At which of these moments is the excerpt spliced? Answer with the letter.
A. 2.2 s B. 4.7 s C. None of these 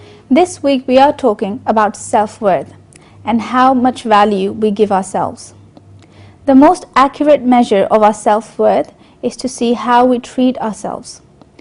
A